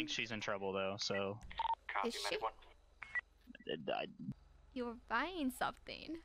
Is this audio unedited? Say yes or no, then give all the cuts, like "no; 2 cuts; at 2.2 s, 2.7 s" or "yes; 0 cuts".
no; 1 cut; at 4.3 s